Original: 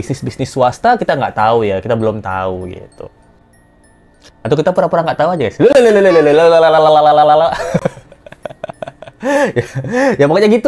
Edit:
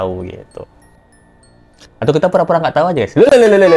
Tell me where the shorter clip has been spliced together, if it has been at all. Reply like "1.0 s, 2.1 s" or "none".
none